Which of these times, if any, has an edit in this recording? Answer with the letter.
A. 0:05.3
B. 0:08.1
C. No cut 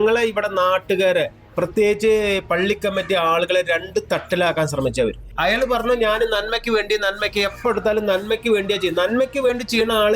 A